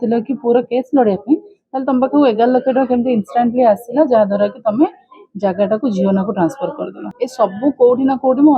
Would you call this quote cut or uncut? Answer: cut